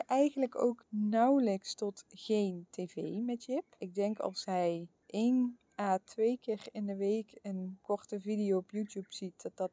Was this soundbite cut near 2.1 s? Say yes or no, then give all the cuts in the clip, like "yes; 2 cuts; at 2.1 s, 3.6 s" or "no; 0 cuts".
no; 5 cuts; at 0.9 s, 3.8 s, 5.0 s, 5.7 s, 7.7 s